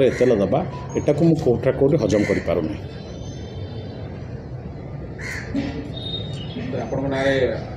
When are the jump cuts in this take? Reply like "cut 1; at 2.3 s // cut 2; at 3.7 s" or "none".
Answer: none